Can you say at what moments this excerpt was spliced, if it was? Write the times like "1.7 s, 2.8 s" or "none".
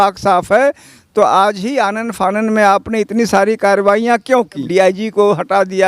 4.7 s

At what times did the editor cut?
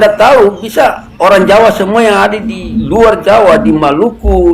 none

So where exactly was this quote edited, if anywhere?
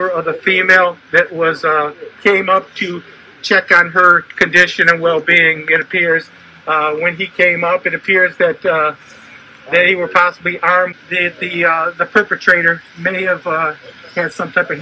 10.9 s

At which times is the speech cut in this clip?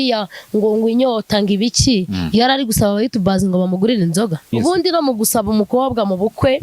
4.5 s

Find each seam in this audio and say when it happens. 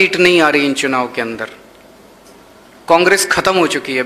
none

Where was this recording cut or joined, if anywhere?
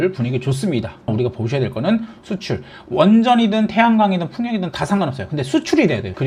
1.1 s, 2.1 s

